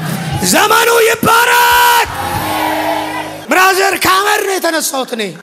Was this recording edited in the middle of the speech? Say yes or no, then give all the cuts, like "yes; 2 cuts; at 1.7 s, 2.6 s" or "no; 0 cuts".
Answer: no; 0 cuts